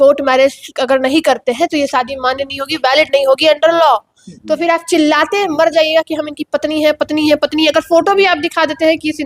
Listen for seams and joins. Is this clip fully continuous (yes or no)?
yes